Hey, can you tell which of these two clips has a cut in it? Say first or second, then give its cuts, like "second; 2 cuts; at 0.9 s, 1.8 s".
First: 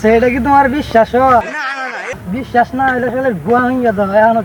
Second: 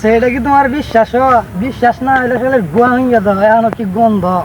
second; 1 cut; at 1.5 s